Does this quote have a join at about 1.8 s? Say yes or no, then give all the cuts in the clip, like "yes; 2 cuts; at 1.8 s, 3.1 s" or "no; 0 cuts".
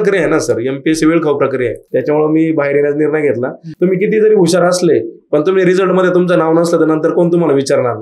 yes; 2 cuts; at 1.8 s, 3.6 s